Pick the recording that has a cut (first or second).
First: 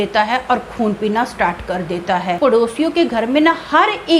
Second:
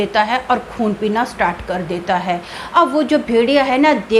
first